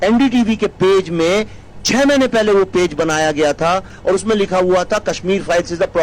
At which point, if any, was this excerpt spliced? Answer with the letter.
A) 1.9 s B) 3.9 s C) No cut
B